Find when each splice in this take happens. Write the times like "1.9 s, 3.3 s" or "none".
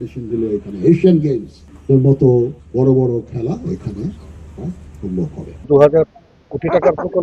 2.6 s, 5.6 s